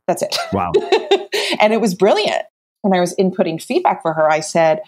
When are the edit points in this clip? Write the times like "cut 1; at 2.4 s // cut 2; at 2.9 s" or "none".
cut 1; at 2.5 s